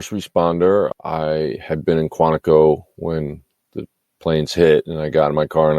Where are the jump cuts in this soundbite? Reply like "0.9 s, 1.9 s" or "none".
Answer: 0.9 s